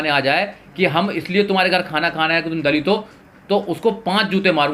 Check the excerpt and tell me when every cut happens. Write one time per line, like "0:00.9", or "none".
none